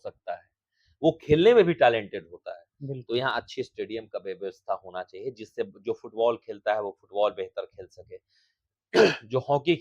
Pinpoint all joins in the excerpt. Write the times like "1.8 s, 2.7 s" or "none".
none